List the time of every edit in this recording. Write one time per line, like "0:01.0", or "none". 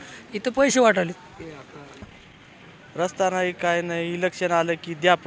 0:02.0